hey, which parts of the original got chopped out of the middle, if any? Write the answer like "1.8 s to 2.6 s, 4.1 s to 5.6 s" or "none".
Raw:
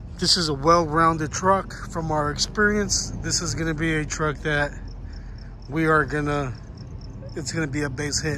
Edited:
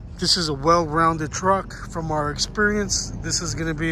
none